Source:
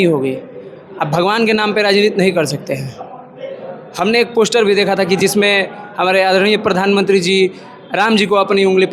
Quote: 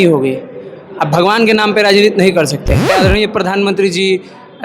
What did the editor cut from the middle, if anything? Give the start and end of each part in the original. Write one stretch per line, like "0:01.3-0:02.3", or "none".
0:02.9-0:06.2